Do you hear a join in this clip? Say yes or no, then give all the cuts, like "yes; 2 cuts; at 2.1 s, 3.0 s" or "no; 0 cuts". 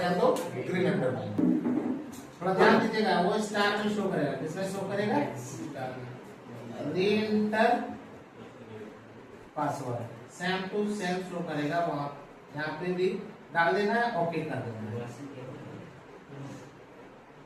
yes; 1 cut; at 1.4 s